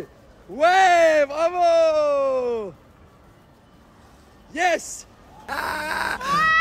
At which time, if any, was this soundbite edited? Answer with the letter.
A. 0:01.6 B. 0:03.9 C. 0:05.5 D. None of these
C